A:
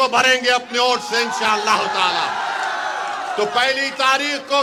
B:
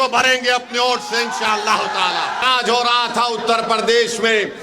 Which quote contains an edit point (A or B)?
B